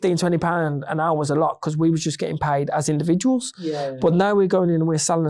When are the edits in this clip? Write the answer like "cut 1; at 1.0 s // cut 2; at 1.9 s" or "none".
none